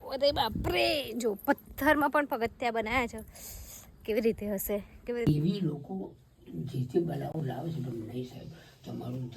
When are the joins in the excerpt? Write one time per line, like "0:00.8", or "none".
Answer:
0:05.2